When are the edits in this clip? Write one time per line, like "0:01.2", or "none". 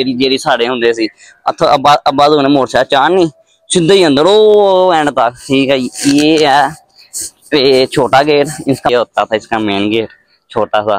0:05.6
0:08.9